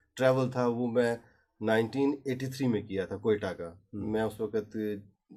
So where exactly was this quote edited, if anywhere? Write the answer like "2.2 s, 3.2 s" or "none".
none